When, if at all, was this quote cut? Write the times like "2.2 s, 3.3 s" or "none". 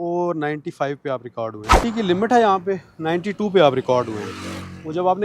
1.7 s

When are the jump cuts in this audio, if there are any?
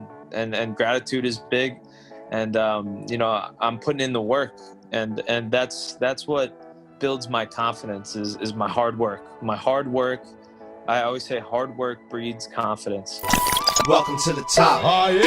13.3 s

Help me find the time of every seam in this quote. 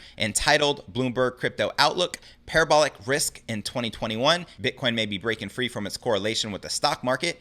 4.6 s

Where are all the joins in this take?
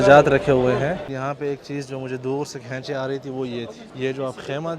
1.0 s, 3.8 s

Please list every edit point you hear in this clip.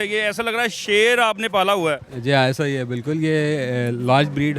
none

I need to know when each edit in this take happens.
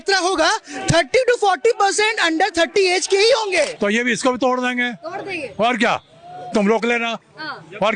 3.7 s

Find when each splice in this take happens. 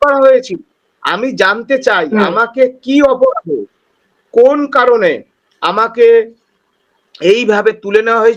none

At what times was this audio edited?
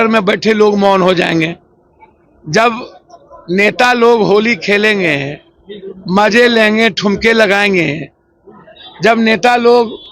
none

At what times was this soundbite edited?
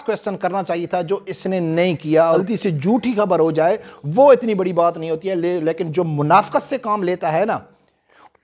2.4 s

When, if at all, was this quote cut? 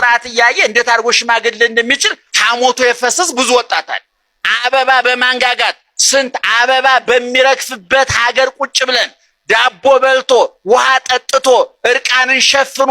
4.5 s

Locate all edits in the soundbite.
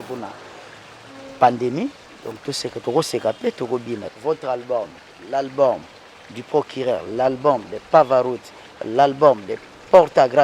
4.1 s

